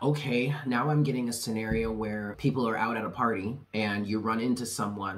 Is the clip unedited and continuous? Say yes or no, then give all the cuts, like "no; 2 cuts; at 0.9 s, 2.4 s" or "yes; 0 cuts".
no; 2 cuts; at 2.3 s, 3.6 s